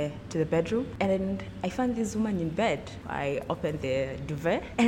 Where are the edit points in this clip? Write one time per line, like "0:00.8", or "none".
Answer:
0:00.9
0:02.9